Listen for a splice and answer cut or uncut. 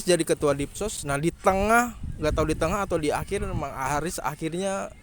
cut